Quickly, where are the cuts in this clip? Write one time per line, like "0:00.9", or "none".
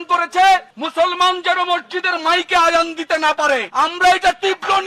none